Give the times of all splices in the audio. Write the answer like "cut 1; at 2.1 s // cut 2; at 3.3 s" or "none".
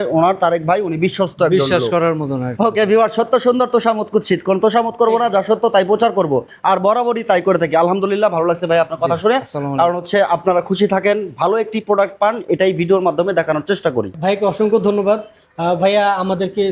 cut 1; at 14.2 s